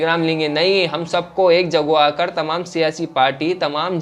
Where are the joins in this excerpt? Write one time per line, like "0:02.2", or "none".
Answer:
none